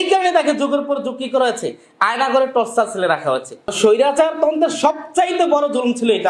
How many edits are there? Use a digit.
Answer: 1